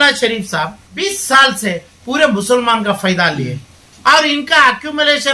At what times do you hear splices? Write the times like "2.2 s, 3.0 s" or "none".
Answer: 1.1 s